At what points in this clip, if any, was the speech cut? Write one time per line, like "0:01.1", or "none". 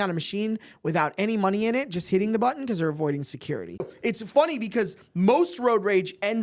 0:03.9